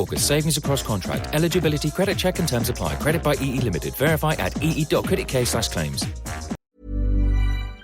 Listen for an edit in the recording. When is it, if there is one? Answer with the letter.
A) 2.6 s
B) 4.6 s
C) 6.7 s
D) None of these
C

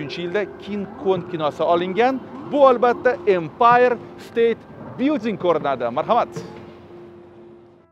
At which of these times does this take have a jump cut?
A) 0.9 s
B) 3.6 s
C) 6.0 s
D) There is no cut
D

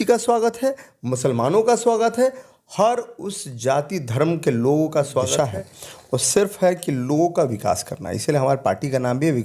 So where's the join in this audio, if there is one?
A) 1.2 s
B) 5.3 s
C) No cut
B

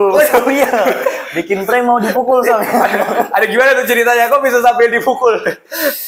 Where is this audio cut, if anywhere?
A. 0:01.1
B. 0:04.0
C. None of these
C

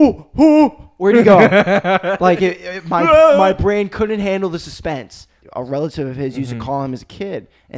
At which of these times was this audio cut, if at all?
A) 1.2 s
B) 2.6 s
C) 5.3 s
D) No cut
C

